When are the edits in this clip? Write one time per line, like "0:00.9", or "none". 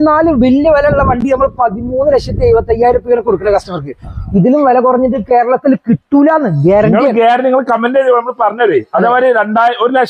none

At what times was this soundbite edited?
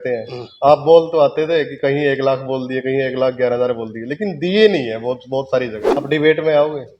0:05.8

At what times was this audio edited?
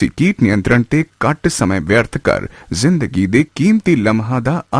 none

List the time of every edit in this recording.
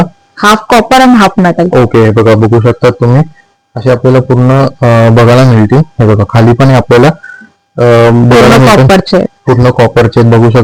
none

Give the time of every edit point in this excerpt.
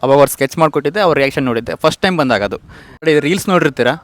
0:03.0

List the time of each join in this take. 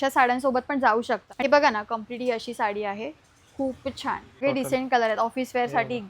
0:01.4
0:04.4

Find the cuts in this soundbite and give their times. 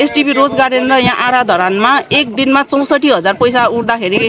none

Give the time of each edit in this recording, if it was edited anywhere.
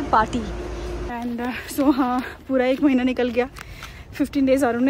0:01.1

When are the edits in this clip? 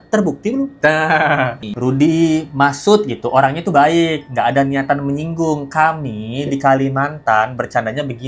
0:01.6

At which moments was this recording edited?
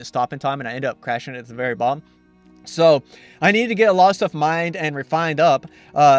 none

